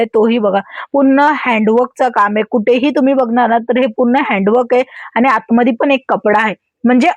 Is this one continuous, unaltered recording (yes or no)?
yes